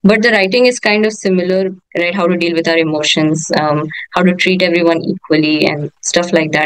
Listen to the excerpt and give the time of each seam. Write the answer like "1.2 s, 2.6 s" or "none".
1.8 s